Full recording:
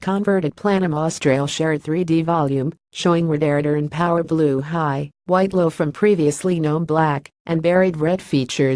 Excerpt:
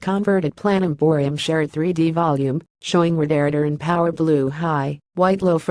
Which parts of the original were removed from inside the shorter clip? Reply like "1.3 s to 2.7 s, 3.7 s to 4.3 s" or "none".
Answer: 1.3 s to 1.4 s